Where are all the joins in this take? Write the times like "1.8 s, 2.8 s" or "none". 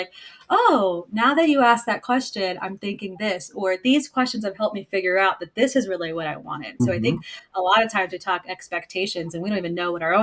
6.8 s